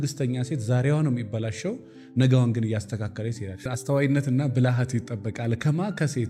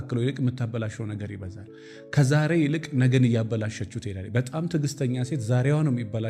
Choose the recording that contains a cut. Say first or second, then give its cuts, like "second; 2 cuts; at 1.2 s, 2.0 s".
first; 1 cut; at 3.6 s